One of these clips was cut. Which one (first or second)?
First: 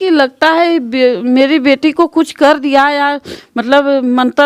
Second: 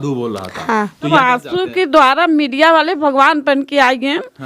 second